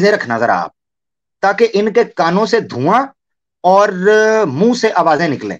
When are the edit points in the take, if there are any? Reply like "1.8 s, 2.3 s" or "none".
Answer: none

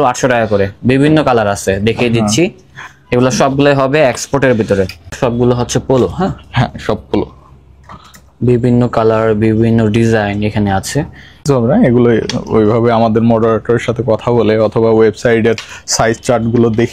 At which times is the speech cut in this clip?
5.2 s, 11.4 s

